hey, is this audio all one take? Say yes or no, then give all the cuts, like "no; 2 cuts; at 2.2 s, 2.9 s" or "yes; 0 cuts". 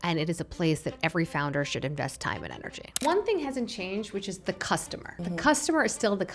no; 2 cuts; at 3.0 s, 5.0 s